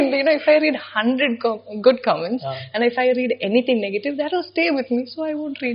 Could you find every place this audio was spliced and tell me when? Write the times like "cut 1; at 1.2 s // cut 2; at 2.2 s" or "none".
none